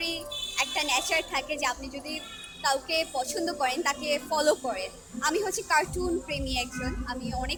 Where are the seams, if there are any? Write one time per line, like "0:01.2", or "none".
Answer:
none